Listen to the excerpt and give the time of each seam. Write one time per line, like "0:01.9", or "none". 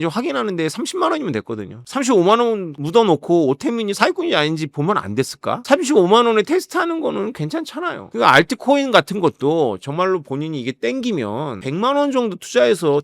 0:01.9
0:08.0
0:11.6